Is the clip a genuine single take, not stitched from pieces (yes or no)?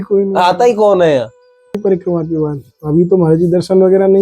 no